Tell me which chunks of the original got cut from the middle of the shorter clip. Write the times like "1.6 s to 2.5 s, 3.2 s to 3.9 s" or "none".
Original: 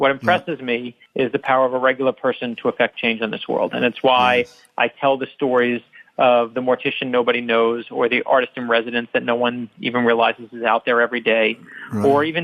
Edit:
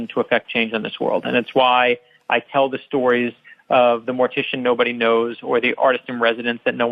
none